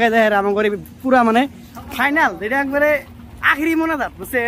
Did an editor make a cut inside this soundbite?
no; 0 cuts

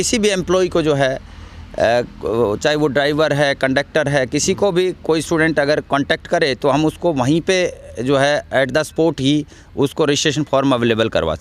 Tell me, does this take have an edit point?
no; 0 cuts

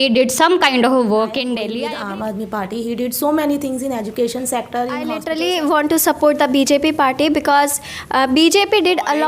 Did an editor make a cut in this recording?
yes; 2 cuts; at 1.7 s, 5.2 s

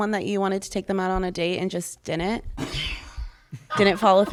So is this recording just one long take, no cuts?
yes; 0 cuts

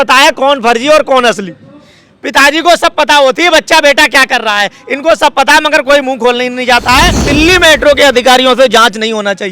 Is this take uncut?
no; 1 cut; at 7.3 s

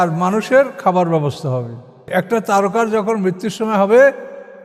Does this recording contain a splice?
yes; 1 cut; at 2.0 s

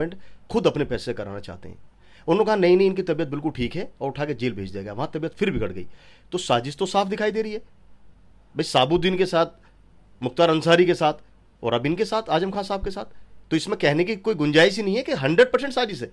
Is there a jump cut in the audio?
no; 0 cuts

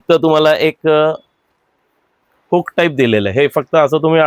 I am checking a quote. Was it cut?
no; 0 cuts

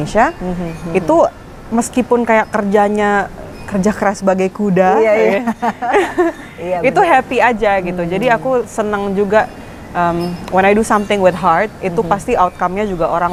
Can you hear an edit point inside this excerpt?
no; 0 cuts

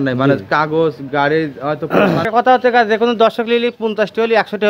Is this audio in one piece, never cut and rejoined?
no; 1 cut; at 2.2 s

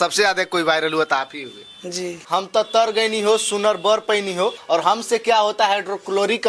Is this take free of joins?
no; 2 cuts; at 2.1 s, 4.6 s

